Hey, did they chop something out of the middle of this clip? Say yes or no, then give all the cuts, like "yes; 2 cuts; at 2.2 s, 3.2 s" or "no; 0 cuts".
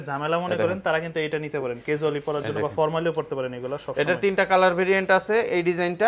no; 0 cuts